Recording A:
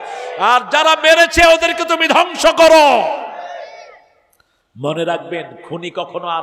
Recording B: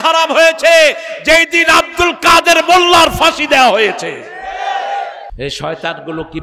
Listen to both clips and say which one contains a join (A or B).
B